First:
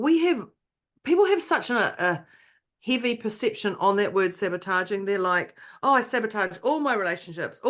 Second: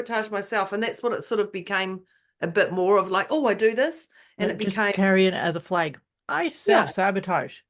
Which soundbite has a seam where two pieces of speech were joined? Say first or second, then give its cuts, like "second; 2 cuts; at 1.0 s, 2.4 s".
first; 1 cut; at 2.7 s